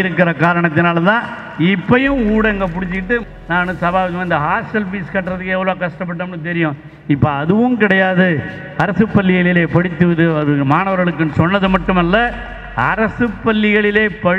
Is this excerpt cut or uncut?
cut